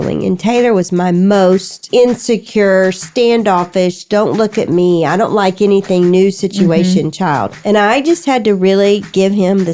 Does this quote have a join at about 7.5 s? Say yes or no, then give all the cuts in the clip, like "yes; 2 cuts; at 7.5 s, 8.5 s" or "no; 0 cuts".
yes; 2 cuts; at 1.8 s, 7.5 s